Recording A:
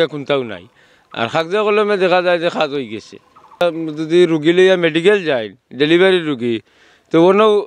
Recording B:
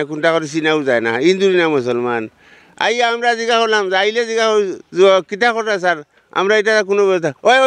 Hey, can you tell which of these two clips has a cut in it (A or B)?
A